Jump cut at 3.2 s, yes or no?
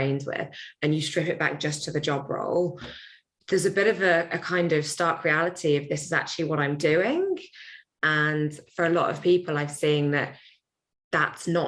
no